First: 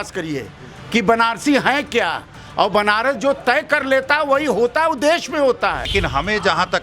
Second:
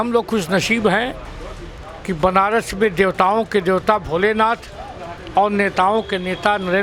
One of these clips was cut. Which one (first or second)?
first